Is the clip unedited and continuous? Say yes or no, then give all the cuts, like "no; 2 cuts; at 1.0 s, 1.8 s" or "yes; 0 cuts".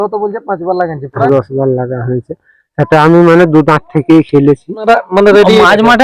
no; 2 cuts; at 1.3 s, 4.8 s